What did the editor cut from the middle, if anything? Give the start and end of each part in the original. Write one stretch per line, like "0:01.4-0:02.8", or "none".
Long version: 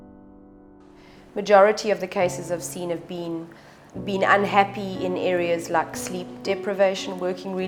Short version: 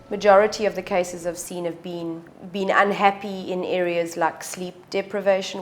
0:03.6-0:03.9